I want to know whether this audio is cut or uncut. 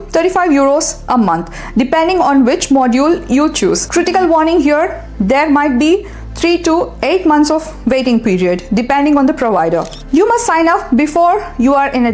uncut